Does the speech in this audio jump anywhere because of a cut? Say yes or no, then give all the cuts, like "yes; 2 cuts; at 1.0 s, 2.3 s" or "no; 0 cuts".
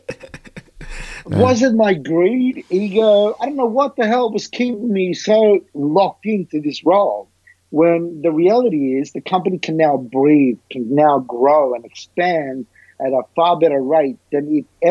no; 0 cuts